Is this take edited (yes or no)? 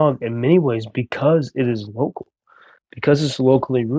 no